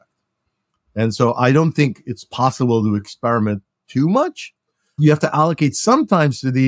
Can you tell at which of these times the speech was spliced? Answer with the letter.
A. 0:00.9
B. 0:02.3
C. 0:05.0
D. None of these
C